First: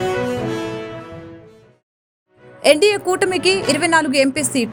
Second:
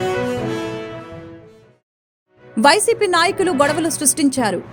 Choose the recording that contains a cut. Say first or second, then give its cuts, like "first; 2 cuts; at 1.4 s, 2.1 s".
second; 1 cut; at 2.5 s